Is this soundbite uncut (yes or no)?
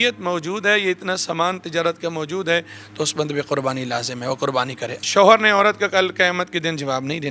no